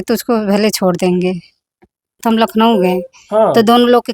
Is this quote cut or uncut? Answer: cut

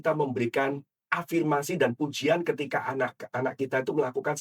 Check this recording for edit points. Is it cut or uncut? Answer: uncut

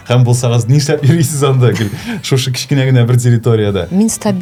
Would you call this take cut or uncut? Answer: uncut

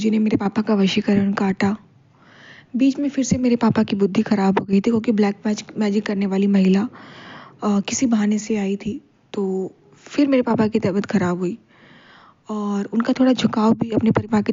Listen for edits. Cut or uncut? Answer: uncut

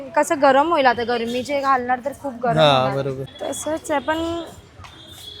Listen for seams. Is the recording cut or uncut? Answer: cut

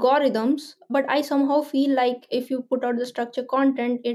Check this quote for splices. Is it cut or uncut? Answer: cut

